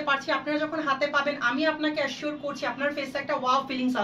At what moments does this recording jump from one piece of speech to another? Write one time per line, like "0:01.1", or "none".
none